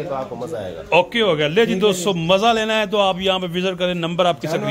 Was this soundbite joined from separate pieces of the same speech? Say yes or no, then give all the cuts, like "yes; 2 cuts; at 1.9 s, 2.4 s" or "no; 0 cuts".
no; 0 cuts